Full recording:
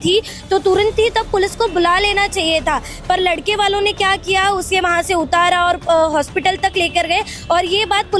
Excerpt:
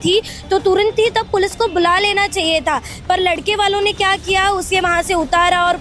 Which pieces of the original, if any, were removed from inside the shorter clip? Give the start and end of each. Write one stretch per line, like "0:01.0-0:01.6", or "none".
none